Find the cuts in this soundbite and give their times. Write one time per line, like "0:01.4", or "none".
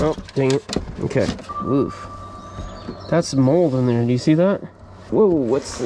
0:01.4
0:05.1

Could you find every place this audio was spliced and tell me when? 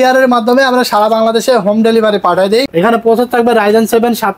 0:02.7

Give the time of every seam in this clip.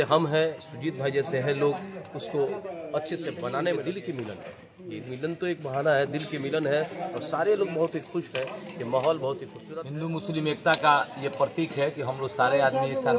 0:03.8
0:09.5

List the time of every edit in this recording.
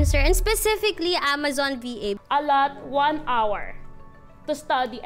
0:02.2

